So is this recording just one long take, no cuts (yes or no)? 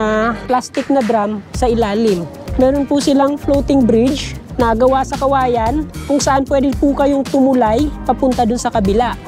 yes